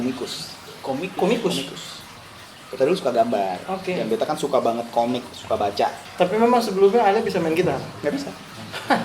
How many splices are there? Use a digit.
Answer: 1